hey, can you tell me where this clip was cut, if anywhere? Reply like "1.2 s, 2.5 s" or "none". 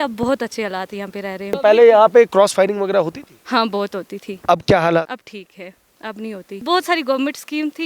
1.6 s, 5.1 s, 6.6 s